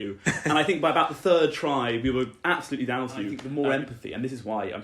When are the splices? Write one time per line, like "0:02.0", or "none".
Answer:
0:03.4

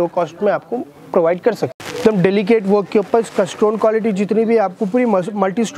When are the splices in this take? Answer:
0:01.8

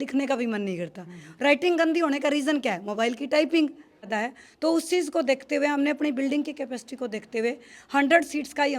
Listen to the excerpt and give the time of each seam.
0:04.1

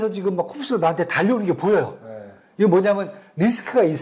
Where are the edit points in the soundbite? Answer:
none

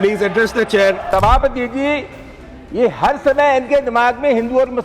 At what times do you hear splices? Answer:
0:01.0

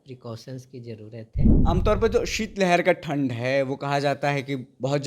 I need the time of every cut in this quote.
0:01.6

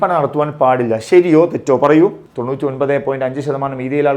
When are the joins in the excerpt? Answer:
0:02.2

